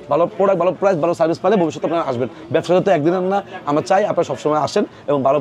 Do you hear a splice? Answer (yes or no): no